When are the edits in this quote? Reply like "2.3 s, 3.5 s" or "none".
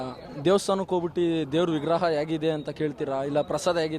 none